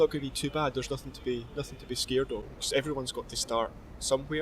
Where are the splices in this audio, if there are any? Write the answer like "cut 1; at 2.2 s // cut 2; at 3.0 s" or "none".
cut 1; at 2.5 s